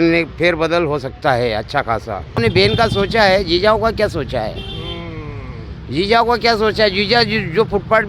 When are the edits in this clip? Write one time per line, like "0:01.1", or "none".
0:02.4